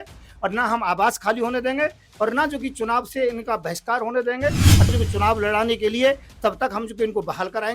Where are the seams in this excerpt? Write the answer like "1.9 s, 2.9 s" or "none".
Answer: 4.9 s